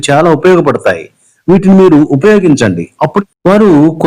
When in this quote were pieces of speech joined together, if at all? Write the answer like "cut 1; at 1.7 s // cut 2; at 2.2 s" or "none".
cut 1; at 3.2 s